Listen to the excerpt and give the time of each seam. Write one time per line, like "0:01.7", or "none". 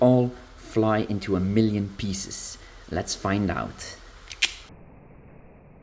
0:04.6